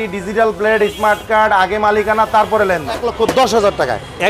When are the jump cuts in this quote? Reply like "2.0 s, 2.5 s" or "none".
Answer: 3.1 s